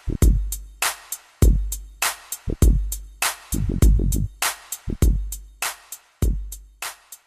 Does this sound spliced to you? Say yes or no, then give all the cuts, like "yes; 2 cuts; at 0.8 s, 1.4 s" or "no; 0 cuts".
yes; 1 cut; at 5.8 s